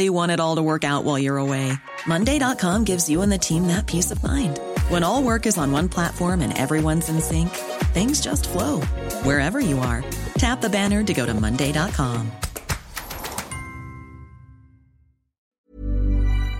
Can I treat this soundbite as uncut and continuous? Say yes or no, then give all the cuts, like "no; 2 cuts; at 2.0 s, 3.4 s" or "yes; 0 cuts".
no; 1 cut; at 15.6 s